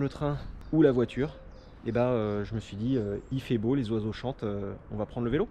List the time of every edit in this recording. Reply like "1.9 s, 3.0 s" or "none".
none